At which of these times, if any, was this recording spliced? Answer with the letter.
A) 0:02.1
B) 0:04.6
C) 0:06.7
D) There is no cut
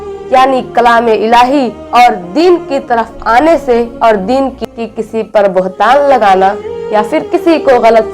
B